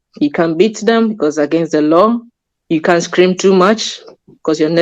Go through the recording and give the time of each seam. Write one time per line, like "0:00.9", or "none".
none